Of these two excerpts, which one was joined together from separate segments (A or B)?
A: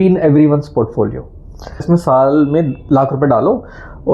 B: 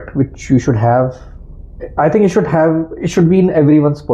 A